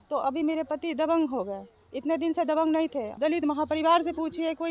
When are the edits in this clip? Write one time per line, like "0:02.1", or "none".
0:03.1